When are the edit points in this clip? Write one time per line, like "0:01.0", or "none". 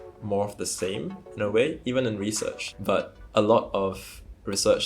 0:02.7